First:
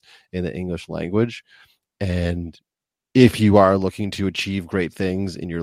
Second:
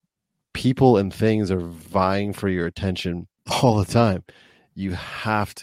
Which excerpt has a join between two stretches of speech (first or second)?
second